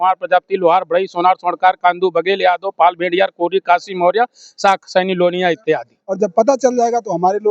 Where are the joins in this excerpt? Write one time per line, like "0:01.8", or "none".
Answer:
0:06.0